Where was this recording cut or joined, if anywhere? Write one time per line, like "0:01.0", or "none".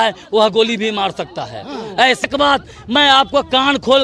0:02.2